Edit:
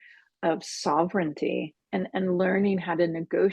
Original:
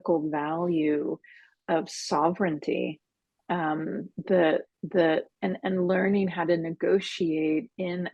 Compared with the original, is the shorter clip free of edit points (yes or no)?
no